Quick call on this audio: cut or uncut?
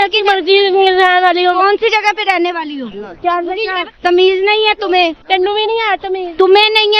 cut